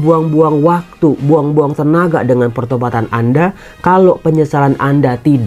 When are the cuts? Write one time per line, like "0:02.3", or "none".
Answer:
none